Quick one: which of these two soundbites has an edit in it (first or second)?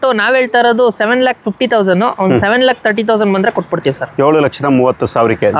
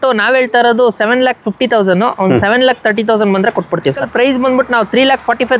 second